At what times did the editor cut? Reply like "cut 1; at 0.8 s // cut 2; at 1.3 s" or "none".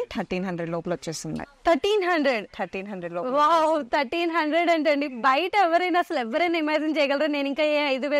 none